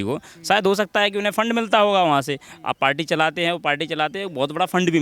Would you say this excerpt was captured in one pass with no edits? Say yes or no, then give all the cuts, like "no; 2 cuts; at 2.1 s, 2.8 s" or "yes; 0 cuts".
yes; 0 cuts